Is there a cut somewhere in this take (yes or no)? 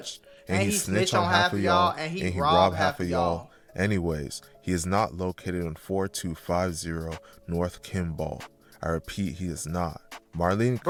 no